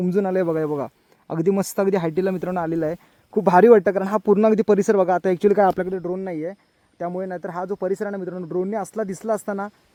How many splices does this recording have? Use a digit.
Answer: 0